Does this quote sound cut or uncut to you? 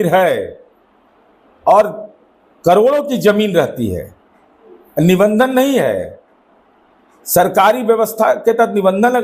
uncut